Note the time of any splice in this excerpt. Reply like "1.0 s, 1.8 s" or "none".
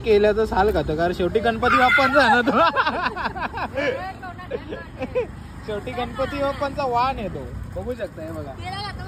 none